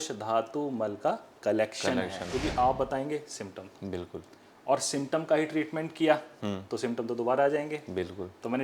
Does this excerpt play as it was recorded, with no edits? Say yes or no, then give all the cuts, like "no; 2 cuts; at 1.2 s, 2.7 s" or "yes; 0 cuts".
no; 1 cut; at 2.2 s